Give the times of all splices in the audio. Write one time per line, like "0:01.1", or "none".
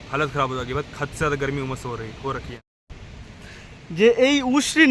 0:02.6